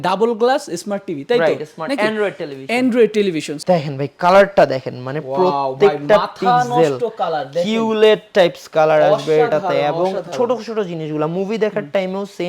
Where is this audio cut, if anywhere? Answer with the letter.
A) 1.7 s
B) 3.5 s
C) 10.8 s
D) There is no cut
B